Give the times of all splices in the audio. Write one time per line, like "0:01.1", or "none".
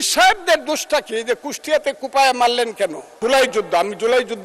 0:03.2